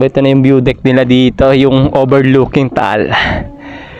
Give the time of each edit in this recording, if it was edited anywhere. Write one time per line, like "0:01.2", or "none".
none